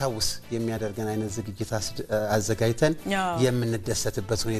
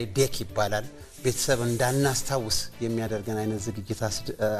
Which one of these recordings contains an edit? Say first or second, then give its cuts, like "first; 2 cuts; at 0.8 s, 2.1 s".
second; 1 cut; at 1.0 s